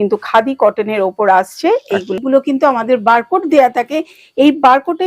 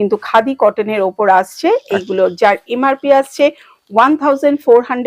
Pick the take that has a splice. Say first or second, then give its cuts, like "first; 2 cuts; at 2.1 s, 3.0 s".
first; 1 cut; at 2.1 s